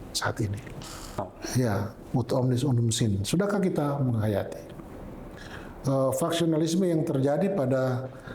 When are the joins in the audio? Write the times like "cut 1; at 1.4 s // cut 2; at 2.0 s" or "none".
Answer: cut 1; at 1.1 s